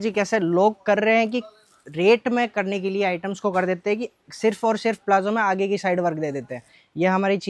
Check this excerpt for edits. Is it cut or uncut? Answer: uncut